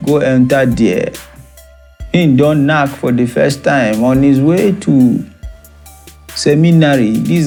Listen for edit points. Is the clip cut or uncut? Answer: uncut